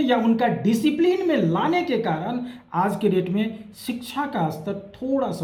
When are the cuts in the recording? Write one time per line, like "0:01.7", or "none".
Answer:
none